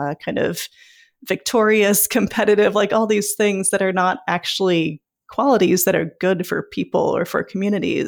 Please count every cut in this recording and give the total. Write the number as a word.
zero